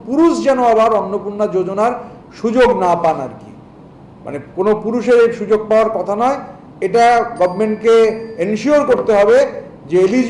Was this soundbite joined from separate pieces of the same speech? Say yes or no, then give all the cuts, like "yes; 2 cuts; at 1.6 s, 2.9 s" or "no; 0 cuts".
no; 0 cuts